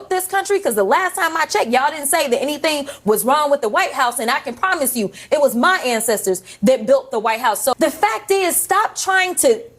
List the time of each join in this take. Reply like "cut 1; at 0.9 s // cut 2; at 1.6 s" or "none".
cut 1; at 7.7 s